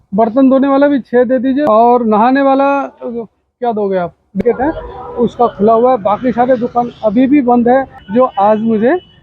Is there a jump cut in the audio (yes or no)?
yes